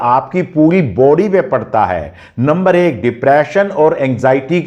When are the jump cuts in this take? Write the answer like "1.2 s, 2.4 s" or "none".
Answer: none